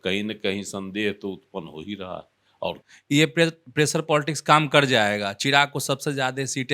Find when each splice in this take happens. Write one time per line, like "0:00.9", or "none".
0:02.8

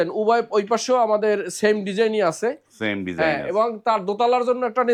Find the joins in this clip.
none

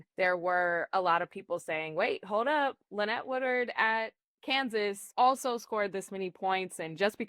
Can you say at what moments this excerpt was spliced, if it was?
0:05.0

